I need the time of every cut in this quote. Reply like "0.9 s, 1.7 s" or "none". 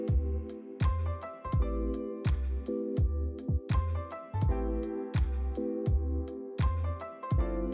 none